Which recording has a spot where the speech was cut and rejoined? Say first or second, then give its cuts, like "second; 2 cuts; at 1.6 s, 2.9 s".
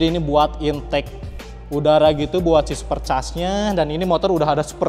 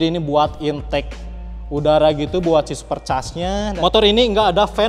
second; 1 cut; at 3.7 s